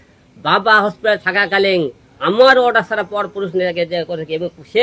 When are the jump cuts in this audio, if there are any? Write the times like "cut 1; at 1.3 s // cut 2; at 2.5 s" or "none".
none